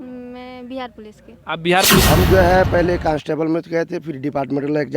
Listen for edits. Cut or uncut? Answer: cut